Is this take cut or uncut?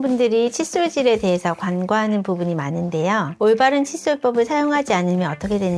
uncut